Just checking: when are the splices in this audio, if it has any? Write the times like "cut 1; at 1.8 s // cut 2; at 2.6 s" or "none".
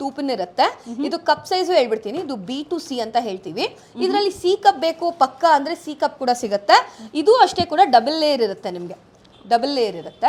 none